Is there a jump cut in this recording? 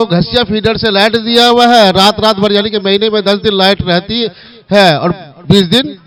no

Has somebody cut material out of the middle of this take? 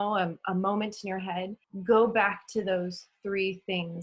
yes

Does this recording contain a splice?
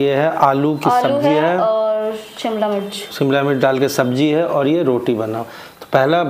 no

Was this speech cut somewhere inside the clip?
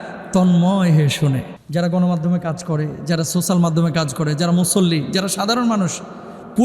yes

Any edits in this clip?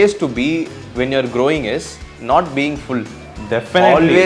no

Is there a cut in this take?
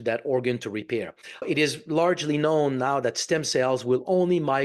yes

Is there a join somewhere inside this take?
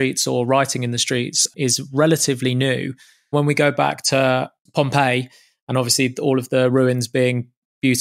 yes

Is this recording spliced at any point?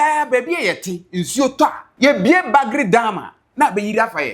yes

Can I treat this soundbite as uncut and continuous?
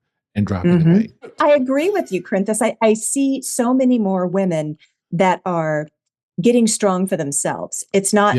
no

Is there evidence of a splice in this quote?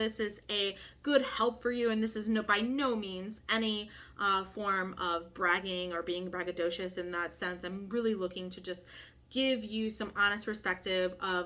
no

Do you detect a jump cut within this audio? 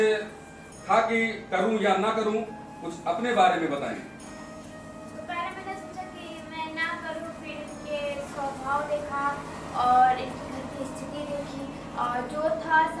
no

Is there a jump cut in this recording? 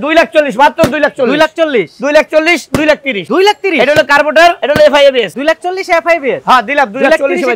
yes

